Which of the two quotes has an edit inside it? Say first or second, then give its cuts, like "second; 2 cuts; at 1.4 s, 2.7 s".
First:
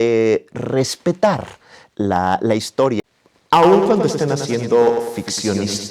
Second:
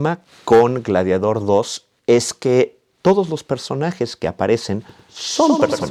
first; 1 cut; at 3.0 s